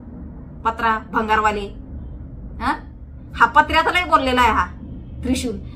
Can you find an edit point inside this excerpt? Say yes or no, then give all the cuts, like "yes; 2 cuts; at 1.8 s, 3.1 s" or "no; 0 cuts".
no; 0 cuts